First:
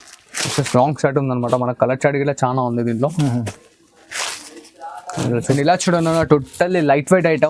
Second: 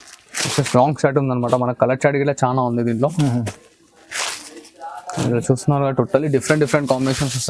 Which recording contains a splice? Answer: first; 1 cut; at 5.6 s

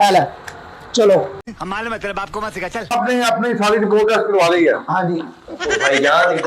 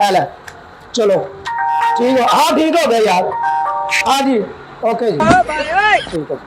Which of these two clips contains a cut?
first; 2 cuts; at 1.4 s, 2.9 s

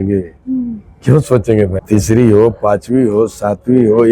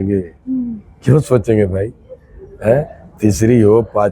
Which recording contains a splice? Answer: first; 1 cut; at 1.8 s

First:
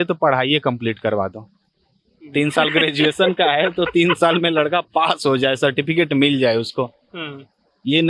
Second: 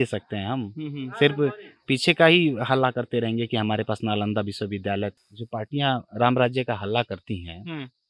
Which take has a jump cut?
second; 1 cut; at 5.3 s

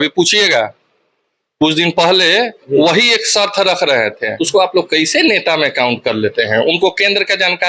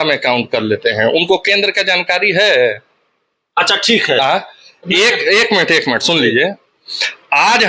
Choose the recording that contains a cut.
first; 1 cut; at 4.3 s

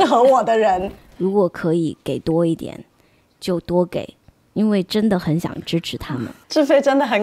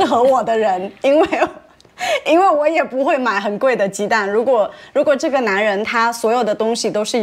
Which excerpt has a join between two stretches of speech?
first; 2 cuts; at 0.9 s, 6.4 s

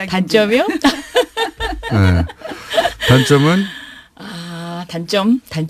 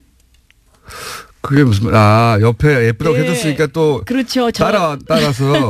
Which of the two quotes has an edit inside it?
first; 1 cut; at 1.6 s

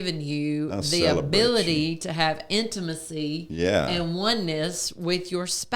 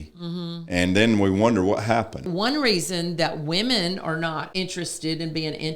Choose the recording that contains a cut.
second; 2 cuts; at 2.2 s, 4.4 s

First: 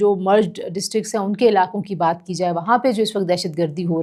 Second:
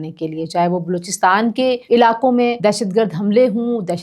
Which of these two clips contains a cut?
second; 2 cuts; at 1.8 s, 2.6 s

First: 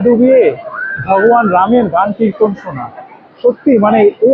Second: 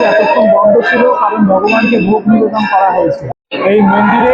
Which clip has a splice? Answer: second; 1 cut; at 3.2 s

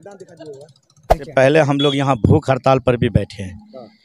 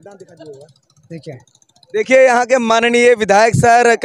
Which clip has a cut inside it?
first; 1 cut; at 1.3 s

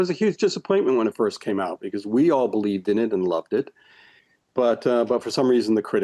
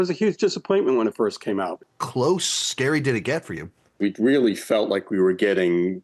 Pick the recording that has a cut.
second; 2 cuts; at 1.9 s, 4.0 s

